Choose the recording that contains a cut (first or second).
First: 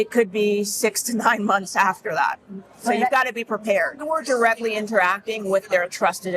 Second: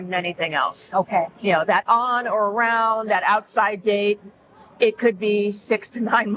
first